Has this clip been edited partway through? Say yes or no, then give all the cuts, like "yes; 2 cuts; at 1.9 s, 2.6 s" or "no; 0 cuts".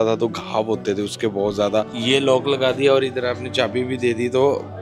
yes; 1 cut; at 1.9 s